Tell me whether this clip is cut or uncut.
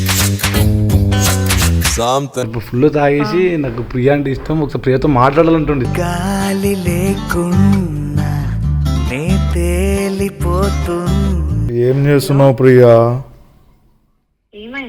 cut